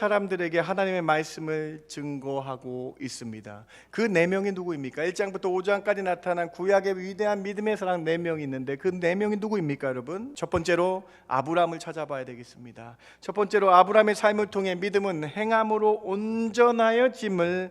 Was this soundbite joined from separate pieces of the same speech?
yes; 1 cut; at 10.3 s

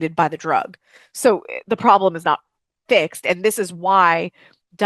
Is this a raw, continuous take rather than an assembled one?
yes; 0 cuts

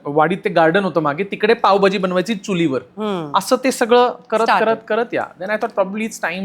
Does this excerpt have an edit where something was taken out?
no; 0 cuts

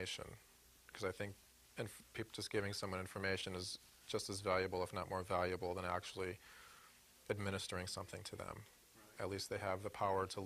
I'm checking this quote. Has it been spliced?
yes; 1 cut; at 3.3 s

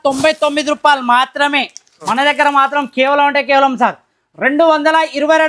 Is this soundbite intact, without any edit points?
no; 1 cut; at 2.1 s

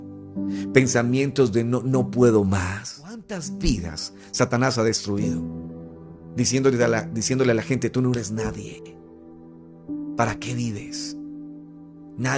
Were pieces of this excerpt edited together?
yes; 1 cut; at 3.4 s

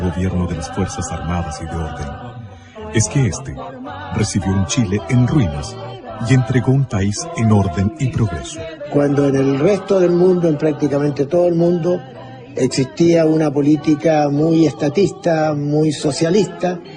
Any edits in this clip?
yes; 1 cut; at 15.4 s

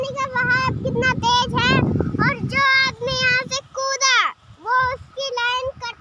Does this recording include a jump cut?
no; 0 cuts

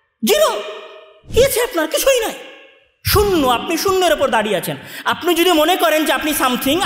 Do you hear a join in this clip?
no; 0 cuts

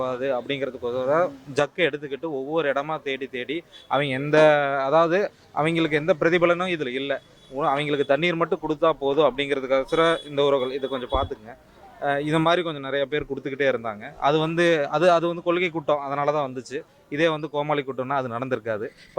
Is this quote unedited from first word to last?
yes; 0 cuts

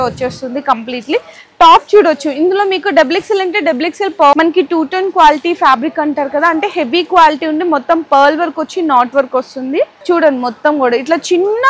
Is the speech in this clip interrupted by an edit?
yes; 2 cuts; at 4.3 s, 10.0 s

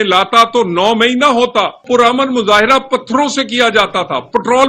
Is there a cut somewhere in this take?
yes; 1 cut; at 1.8 s

